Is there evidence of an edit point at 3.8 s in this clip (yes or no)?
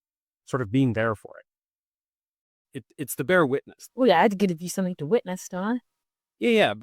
yes